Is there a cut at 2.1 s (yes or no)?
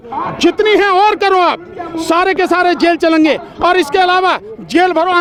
no